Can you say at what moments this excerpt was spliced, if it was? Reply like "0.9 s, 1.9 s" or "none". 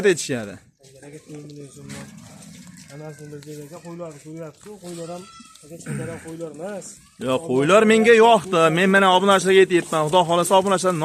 none